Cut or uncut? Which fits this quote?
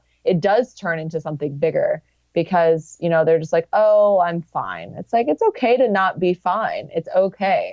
uncut